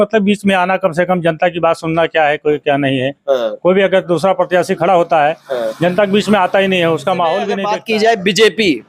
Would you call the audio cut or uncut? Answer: cut